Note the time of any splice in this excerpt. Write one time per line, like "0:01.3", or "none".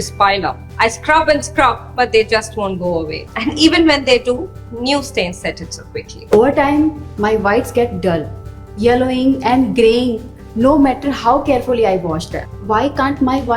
0:06.3